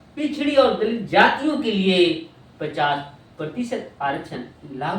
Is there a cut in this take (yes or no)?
no